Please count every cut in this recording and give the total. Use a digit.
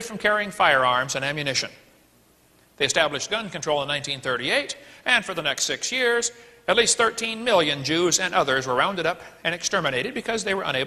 1